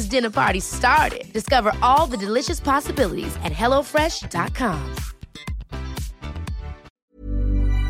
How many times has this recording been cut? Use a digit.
1